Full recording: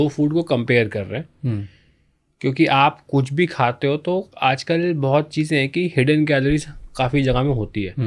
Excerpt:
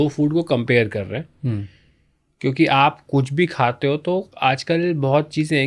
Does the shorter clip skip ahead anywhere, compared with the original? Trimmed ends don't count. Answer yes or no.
no